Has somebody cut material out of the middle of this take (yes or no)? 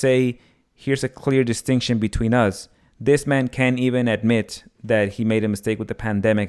no